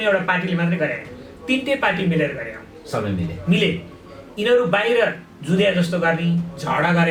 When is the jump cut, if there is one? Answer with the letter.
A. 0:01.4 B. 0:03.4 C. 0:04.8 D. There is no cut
D